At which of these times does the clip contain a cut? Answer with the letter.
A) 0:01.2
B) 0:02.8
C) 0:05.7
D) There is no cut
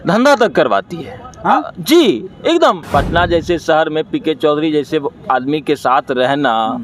B